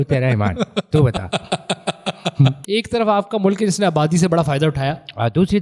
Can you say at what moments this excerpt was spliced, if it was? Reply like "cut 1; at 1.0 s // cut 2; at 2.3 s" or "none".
cut 1; at 2.6 s